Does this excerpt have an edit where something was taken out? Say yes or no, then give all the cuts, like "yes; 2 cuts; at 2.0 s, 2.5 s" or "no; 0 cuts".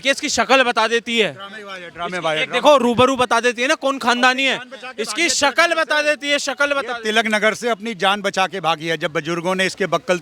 no; 0 cuts